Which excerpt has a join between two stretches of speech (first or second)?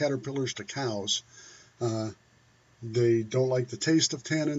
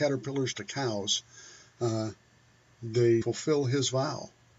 first